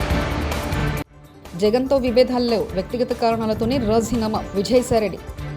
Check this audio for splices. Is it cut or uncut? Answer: cut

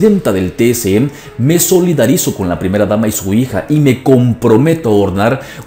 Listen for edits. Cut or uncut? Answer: uncut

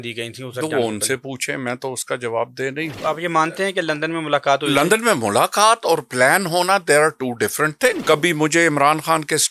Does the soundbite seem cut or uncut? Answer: cut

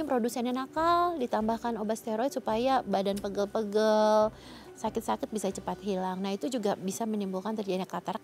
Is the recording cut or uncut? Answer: uncut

